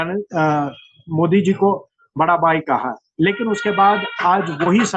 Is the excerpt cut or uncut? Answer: uncut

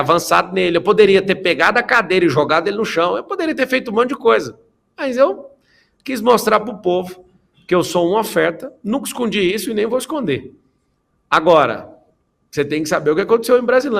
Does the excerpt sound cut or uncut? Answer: uncut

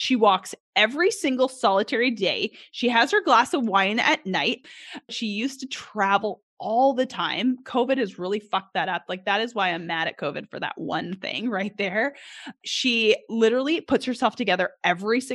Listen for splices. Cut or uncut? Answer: cut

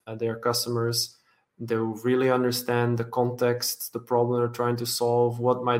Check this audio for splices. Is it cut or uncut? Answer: uncut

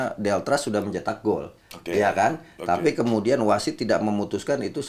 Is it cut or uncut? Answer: uncut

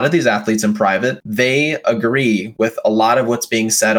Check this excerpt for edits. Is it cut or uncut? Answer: cut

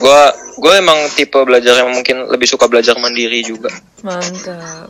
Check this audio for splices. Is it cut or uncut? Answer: uncut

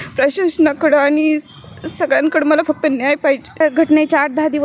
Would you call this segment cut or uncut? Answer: cut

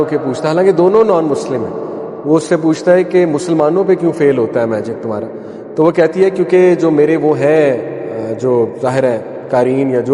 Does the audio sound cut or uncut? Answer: uncut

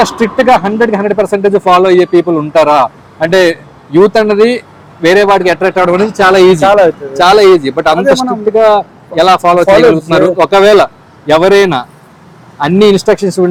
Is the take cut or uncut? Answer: uncut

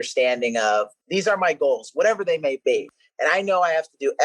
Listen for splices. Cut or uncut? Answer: cut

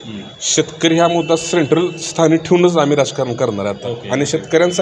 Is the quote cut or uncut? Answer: uncut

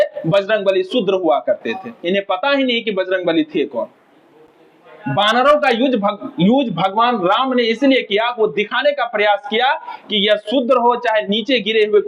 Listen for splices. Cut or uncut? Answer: uncut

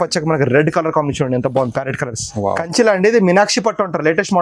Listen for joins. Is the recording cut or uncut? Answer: cut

